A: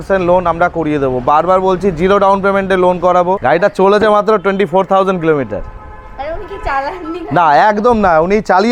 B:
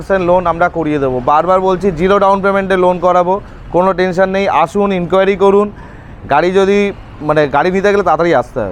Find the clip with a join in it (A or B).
A